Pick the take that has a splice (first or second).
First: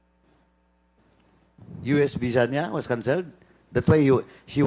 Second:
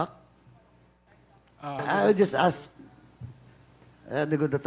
second